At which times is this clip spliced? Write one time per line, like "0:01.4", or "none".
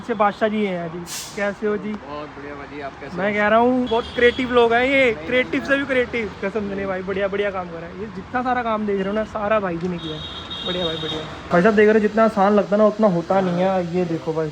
none